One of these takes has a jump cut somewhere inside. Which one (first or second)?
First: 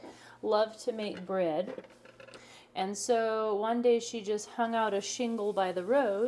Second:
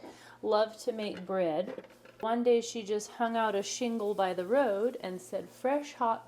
second